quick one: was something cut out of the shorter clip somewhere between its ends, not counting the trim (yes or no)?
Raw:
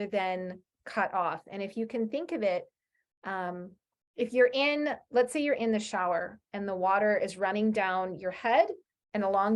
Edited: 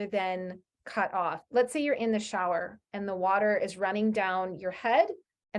yes